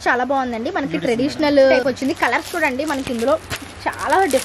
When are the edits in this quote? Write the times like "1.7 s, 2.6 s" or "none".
1.8 s